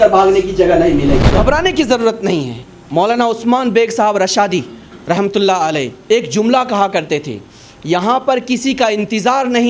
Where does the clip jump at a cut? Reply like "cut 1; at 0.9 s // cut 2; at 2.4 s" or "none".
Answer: cut 1; at 1.3 s